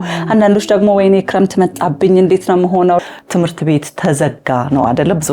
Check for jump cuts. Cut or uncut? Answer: cut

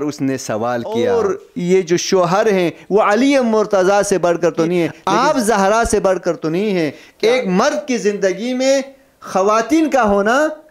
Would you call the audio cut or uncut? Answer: cut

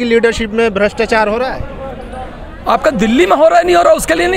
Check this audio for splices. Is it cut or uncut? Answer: uncut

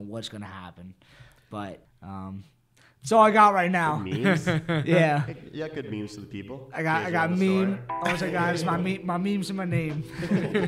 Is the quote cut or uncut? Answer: cut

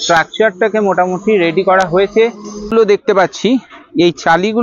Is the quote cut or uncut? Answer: cut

